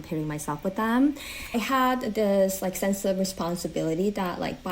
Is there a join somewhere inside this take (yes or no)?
yes